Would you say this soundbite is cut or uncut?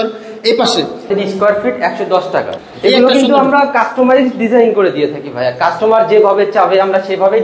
cut